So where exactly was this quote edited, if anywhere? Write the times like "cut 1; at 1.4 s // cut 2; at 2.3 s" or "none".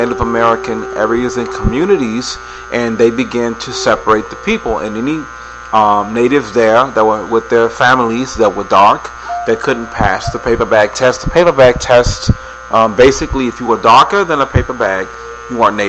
cut 1; at 4.5 s